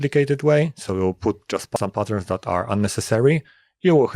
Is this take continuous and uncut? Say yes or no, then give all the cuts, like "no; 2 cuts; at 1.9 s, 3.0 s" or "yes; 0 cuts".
no; 1 cut; at 1.8 s